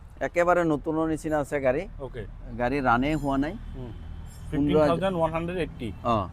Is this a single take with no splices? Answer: yes; 0 cuts

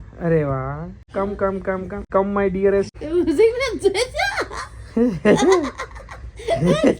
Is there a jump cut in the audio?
yes; 3 cuts; at 1.0 s, 2.0 s, 3.0 s

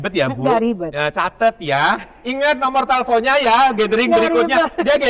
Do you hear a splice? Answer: no; 0 cuts

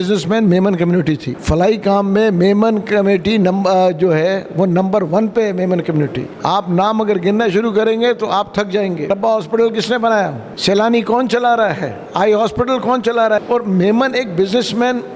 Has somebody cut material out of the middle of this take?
yes; 6 cuts; at 1.3 s, 6.3 s, 9.0 s, 10.5 s, 12.0 s, 13.4 s

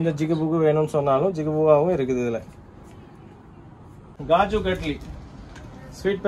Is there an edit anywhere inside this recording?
yes; 1 cut; at 4.1 s

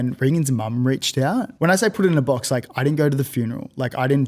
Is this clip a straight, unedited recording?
no; 1 cut; at 1.5 s

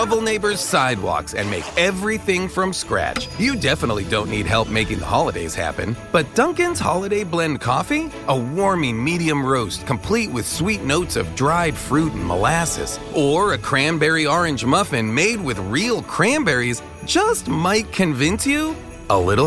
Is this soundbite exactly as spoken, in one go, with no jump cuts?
yes; 0 cuts

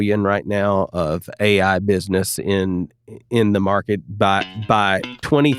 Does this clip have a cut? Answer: no; 0 cuts

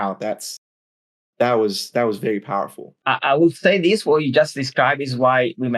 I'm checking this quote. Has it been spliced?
yes; 1 cut; at 2.9 s

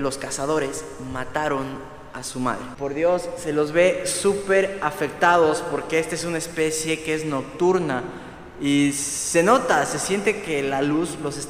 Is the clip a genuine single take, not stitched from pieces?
no; 1 cut; at 2.7 s

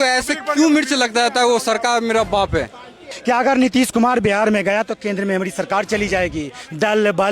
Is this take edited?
yes; 1 cut; at 3.1 s

